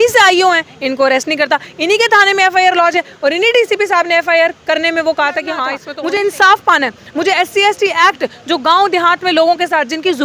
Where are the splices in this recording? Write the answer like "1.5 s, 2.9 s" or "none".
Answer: 5.8 s